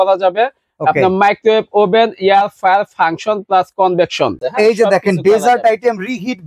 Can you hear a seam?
yes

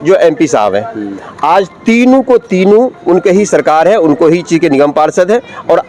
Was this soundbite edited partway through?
no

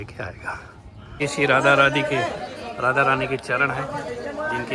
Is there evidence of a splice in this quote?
yes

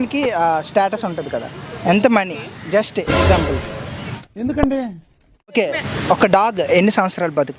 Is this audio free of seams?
no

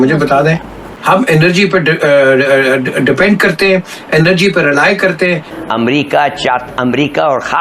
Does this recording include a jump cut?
yes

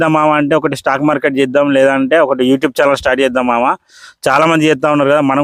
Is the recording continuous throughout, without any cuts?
yes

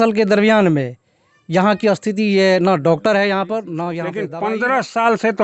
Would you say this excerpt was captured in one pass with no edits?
no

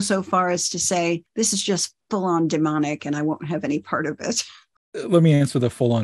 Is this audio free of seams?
no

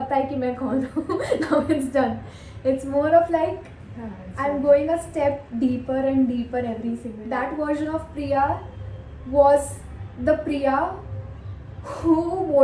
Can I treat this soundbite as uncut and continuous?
no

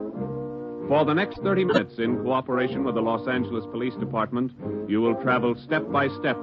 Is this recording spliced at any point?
yes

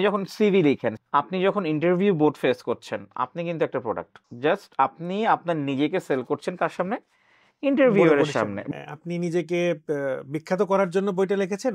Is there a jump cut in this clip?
yes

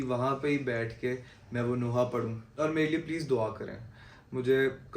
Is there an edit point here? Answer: yes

